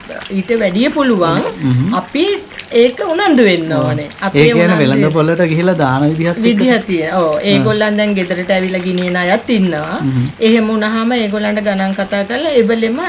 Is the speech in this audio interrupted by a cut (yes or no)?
no